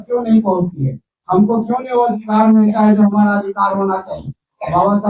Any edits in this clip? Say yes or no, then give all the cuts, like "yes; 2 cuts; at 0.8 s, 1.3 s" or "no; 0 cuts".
no; 0 cuts